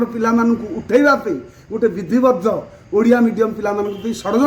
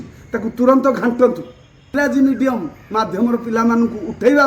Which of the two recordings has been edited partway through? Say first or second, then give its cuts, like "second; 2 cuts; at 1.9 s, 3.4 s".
second; 1 cut; at 1.9 s